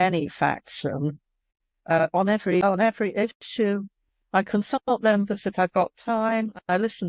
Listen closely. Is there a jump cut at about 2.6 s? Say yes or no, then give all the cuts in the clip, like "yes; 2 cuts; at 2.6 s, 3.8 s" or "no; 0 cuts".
yes; 1 cut; at 2.6 s